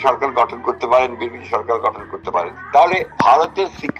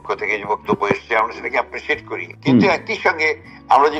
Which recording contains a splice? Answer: first; 1 cut; at 2.9 s

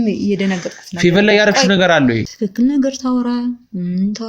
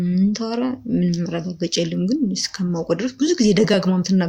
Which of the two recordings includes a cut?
first; 1 cut; at 2.4 s

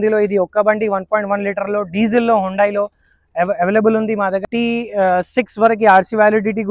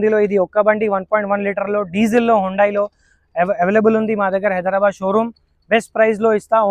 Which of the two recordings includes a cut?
first; 1 cut; at 4.4 s

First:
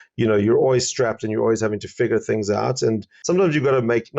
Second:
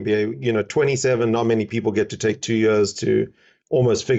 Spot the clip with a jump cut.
first; 1 cut; at 3.1 s

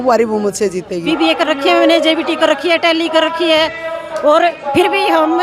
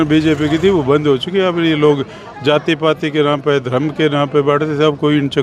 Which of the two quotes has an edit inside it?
first; 1 cut; at 1.1 s

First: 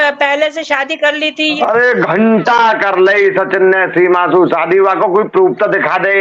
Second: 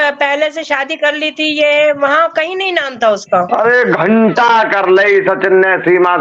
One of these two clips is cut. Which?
first; 1 cut; at 1.6 s

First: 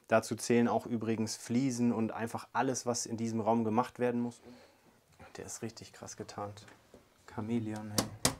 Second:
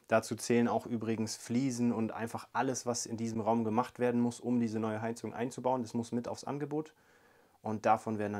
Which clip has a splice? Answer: first; 1 cut; at 4.4 s

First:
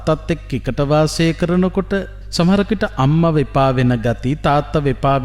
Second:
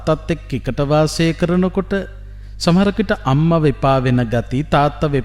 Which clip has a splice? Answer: first; 1 cut; at 2.2 s

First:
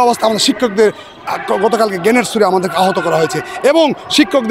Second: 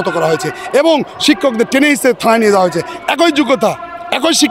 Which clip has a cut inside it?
second; 1 cut; at 2.9 s

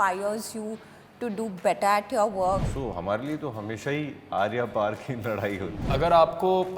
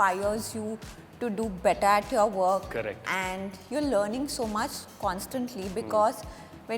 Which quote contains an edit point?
first; 2 cuts; at 2.7 s, 5.9 s

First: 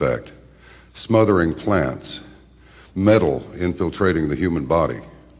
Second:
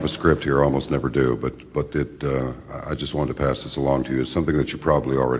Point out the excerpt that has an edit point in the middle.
first; 1 cut; at 2.9 s

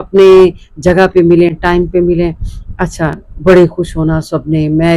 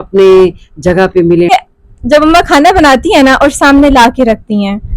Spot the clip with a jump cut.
second; 1 cut; at 1.5 s

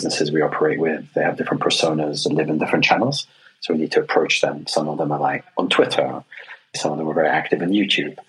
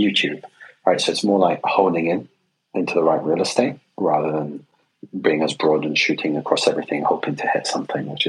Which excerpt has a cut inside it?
first; 1 cut; at 6.8 s

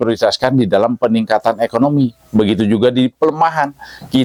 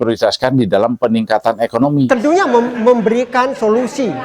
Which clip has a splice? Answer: second; 1 cut; at 2.1 s

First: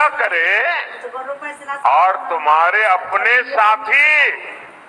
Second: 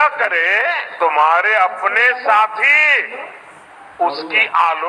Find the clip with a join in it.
second; 1 cut; at 0.9 s

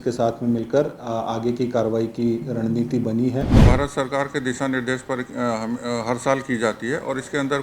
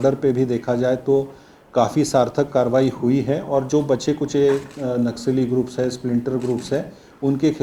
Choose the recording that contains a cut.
first; 1 cut; at 3.7 s

